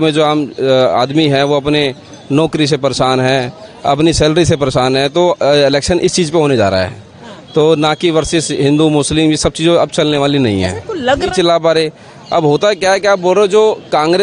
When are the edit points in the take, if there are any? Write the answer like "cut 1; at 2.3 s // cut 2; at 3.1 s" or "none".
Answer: cut 1; at 11.3 s